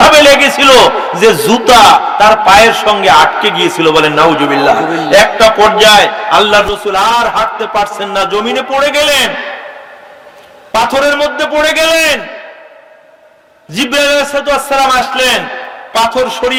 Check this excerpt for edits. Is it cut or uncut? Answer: uncut